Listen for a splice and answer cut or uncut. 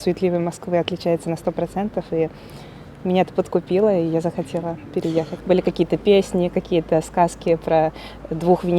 cut